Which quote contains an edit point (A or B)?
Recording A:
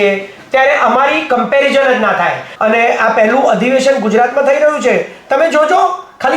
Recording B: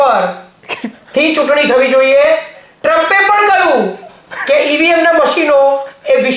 A